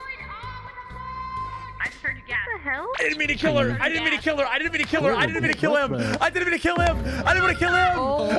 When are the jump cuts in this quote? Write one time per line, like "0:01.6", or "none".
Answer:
none